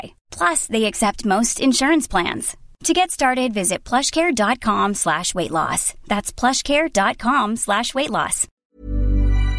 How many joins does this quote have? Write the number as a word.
one